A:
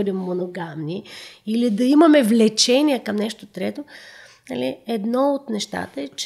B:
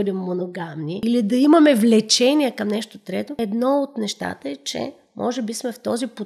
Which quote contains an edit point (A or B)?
B